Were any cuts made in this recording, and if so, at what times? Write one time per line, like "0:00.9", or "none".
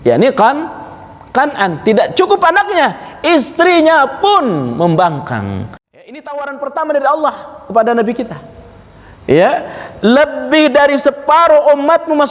0:05.8